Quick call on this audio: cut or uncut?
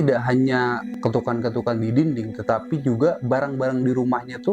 cut